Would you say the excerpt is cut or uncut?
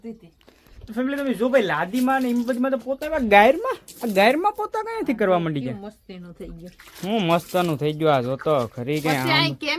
uncut